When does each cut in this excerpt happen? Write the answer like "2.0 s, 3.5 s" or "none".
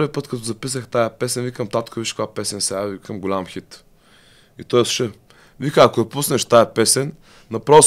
none

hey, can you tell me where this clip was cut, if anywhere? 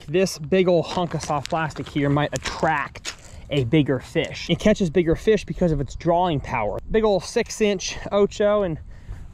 4.4 s, 6.8 s

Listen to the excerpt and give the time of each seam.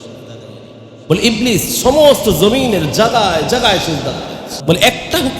4.5 s

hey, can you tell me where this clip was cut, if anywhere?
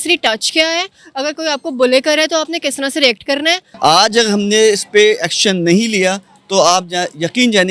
3.7 s

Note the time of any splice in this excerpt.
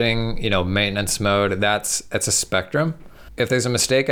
3.2 s

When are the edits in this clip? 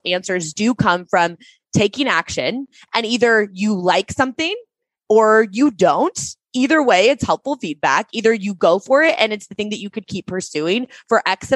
none

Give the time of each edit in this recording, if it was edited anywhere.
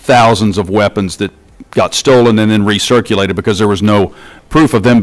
none

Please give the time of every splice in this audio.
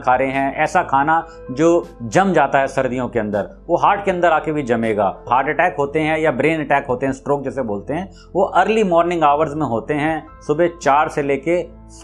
5.3 s

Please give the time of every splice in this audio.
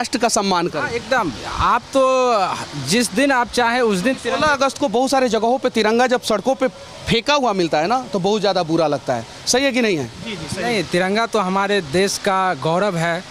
none

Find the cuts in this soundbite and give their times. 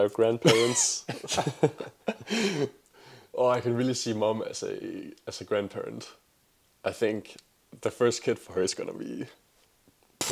none

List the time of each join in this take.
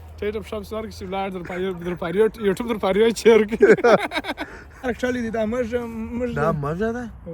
4.8 s

